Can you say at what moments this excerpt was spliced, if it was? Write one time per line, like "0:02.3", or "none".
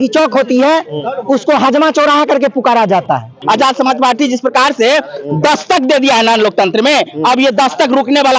0:03.4